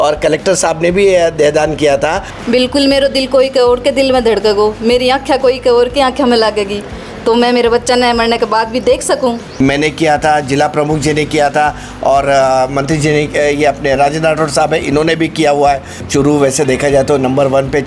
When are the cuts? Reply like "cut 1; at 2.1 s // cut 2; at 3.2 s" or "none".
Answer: cut 1; at 2.3 s // cut 2; at 9.5 s // cut 3; at 16.0 s